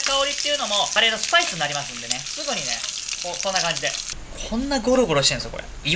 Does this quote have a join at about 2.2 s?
yes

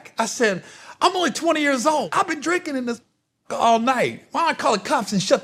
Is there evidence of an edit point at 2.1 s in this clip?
yes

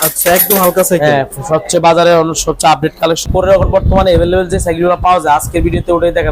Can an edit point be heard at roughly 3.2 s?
yes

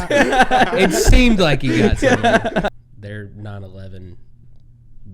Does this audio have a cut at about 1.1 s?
no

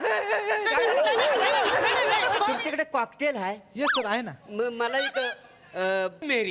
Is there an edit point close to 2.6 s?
yes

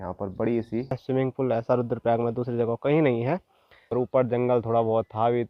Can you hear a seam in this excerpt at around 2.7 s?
no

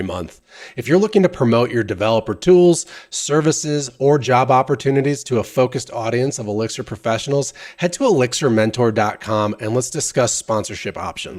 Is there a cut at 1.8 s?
no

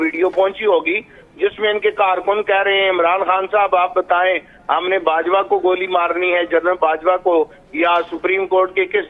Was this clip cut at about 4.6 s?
no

